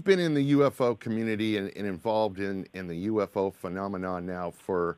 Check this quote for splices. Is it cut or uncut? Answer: uncut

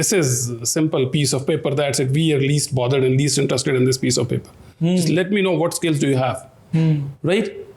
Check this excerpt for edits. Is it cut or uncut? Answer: uncut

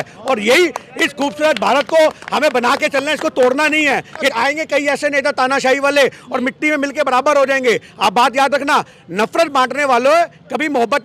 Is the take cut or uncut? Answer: cut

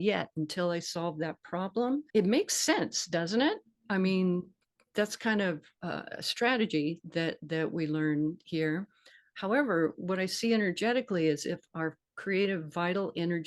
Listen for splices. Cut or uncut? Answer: cut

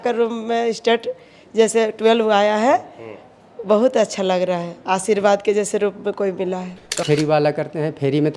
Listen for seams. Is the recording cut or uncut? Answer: cut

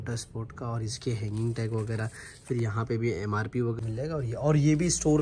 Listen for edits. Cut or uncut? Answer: cut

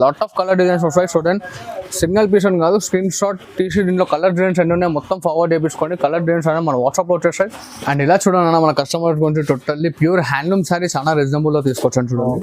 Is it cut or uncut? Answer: cut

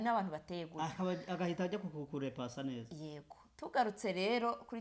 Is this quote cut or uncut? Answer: uncut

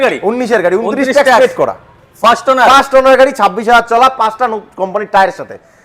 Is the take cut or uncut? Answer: uncut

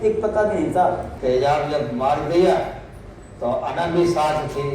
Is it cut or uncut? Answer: cut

